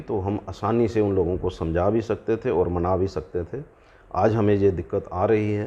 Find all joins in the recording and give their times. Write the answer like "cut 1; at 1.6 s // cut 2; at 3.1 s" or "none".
none